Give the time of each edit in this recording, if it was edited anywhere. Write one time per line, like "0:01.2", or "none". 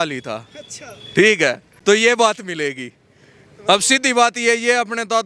none